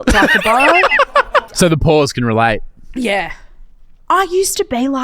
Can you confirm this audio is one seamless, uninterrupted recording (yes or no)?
no